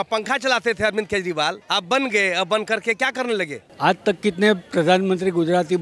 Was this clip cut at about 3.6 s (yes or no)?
yes